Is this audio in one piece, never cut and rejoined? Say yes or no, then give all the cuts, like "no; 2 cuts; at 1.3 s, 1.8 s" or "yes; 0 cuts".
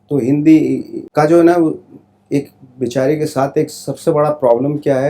yes; 0 cuts